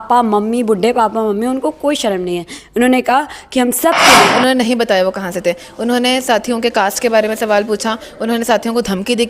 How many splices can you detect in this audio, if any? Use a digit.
1